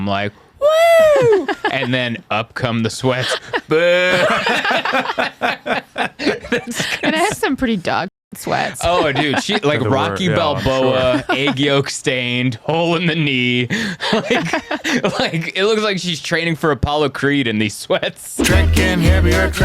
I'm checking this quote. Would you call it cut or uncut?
cut